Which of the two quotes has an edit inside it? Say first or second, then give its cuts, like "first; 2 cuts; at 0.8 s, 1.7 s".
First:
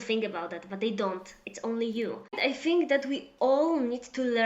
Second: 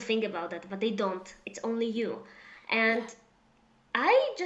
first; 1 cut; at 2.4 s